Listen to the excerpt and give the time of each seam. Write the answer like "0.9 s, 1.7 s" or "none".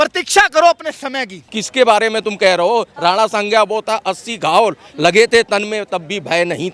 1.6 s